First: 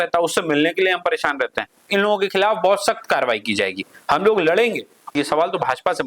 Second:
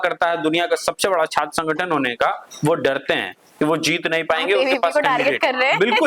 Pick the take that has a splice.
first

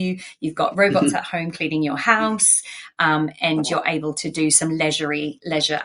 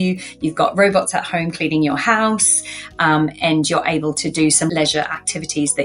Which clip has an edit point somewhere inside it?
second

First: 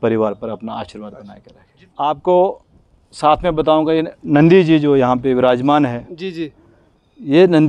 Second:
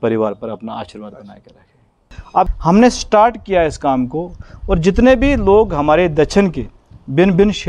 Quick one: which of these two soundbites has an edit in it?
second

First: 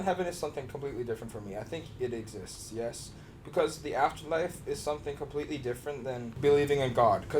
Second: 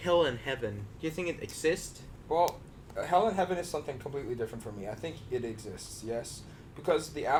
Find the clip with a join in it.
first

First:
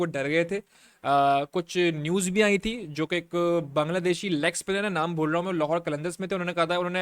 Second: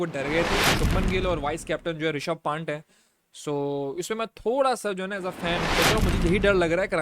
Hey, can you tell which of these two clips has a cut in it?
second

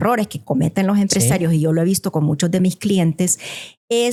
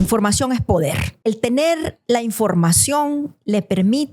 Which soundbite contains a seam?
second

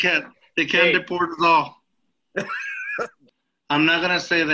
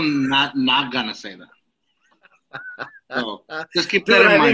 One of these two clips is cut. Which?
first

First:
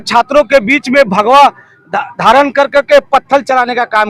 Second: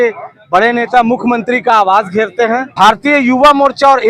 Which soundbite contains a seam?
second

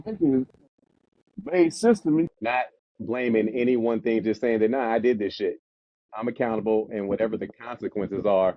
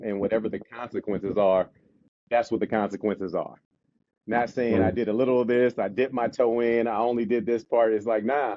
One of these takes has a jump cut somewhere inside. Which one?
first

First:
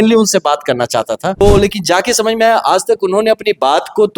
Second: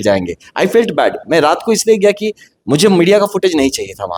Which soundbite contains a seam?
first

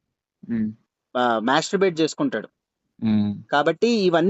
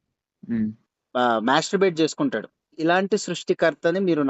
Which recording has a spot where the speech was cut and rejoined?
second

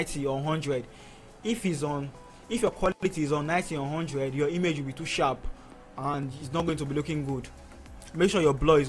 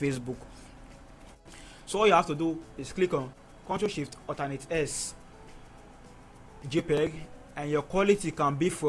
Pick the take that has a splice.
second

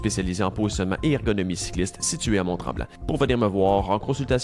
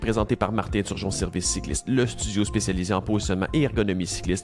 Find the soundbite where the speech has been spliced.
first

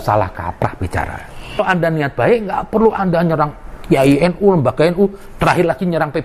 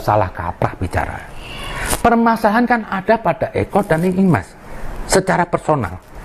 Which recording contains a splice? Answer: first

